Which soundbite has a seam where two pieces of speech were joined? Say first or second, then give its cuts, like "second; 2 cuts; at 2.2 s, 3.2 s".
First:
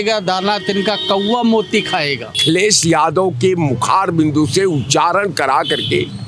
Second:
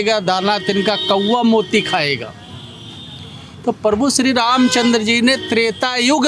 first; 1 cut; at 2.4 s